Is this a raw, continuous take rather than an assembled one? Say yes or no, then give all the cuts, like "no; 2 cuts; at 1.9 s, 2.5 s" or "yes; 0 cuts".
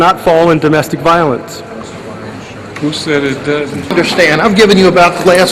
no; 1 cut; at 3.9 s